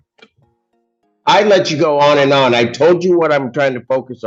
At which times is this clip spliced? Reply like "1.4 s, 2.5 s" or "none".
none